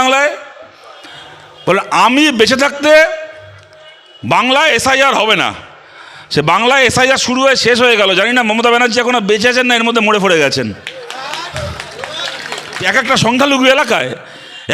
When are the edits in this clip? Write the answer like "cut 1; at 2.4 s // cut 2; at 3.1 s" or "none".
cut 1; at 12.9 s